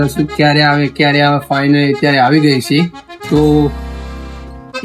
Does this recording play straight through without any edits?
no; 1 cut; at 3.1 s

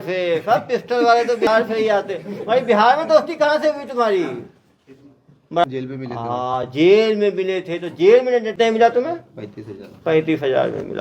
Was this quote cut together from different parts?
yes; 3 cuts; at 1.5 s, 5.6 s, 8.5 s

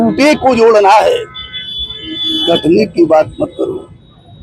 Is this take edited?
no; 0 cuts

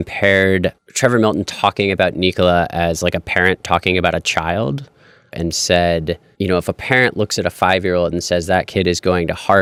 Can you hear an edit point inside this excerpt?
no; 0 cuts

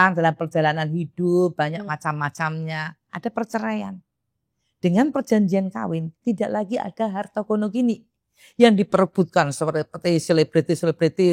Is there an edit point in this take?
no; 0 cuts

